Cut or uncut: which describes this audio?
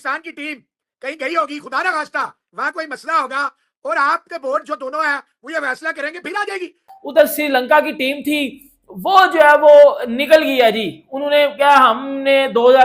cut